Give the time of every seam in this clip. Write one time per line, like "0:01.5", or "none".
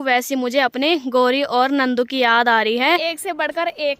0:03.0

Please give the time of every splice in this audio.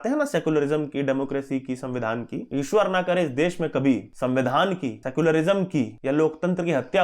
0:02.4
0:04.1
0:05.0
0:05.9

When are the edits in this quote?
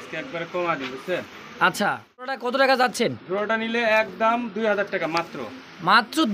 0:02.4

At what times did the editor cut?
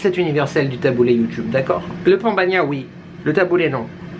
none

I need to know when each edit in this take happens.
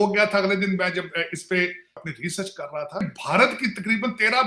0:02.0
0:03.0

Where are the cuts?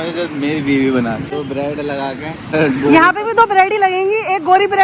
0:01.4
0:02.5

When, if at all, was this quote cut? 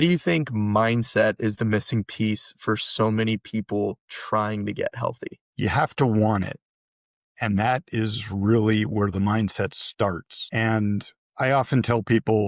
none

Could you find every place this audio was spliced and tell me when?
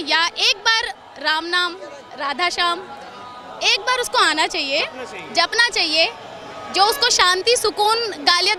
none

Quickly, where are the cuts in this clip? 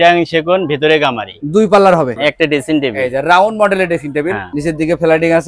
0:02.1
0:04.5

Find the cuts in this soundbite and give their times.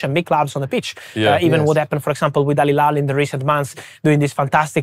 none

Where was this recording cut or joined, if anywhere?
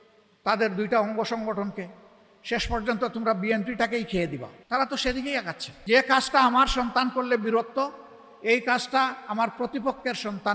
0:04.5
0:05.6

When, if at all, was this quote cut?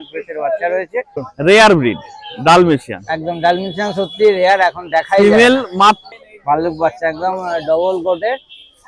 0:01.2
0:06.1

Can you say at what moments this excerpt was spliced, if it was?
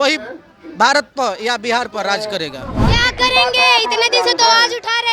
0:02.8

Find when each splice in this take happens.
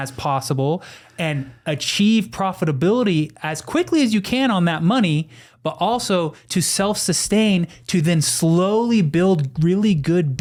none

